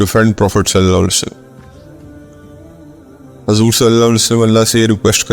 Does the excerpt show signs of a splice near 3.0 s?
yes; 2 cuts; at 1.4 s, 3.0 s

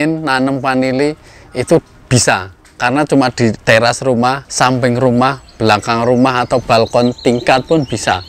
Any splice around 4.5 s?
yes; 1 cut; at 4.5 s

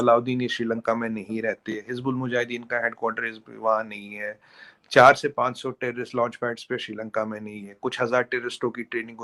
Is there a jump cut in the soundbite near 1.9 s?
no; 0 cuts

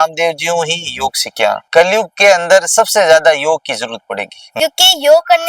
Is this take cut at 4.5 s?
yes; 2 cuts; at 1.6 s, 4.5 s

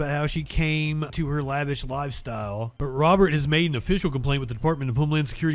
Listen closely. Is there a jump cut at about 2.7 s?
yes; 2 cuts; at 1.1 s, 2.7 s

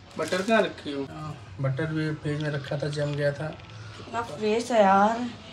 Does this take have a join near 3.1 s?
no; 1 cut; at 1.2 s

